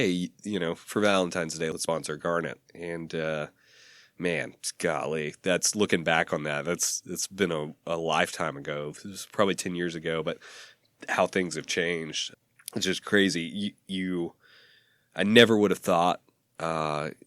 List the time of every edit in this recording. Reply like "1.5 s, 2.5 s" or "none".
1.7 s, 12.2 s